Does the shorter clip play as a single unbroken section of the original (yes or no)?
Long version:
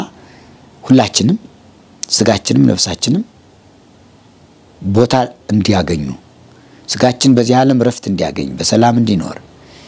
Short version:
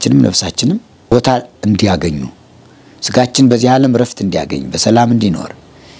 no